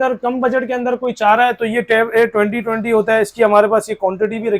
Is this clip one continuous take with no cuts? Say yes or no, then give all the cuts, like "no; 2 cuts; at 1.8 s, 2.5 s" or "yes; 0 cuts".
yes; 0 cuts